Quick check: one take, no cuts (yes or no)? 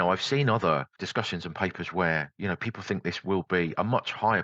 no